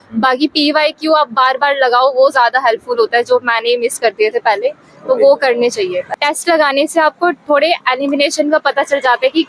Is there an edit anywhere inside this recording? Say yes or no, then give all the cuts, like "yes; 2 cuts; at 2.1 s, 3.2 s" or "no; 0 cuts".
yes; 1 cut; at 6.2 s